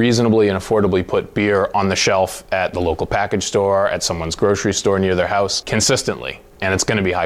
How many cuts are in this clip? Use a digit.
0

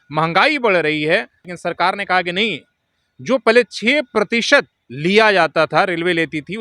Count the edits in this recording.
2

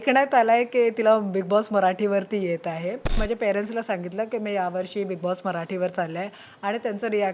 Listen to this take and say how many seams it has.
1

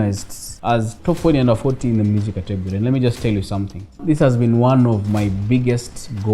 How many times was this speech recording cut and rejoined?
1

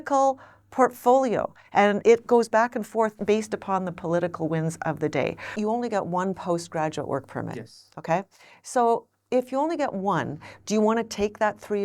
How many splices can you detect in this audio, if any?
3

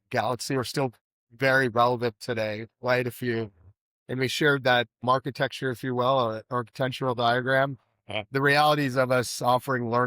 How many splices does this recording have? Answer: 1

